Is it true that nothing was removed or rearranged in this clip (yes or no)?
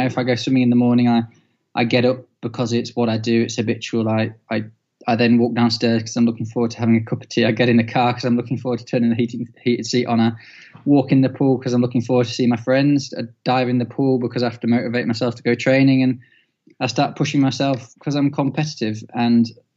yes